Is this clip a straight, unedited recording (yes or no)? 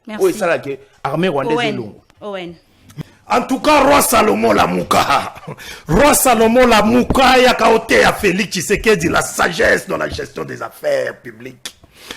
no